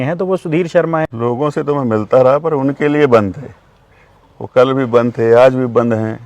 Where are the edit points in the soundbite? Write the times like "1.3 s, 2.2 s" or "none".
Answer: 1.1 s